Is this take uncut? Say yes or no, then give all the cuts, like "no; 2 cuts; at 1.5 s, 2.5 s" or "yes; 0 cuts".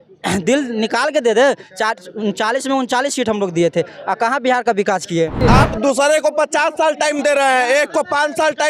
no; 1 cut; at 5.4 s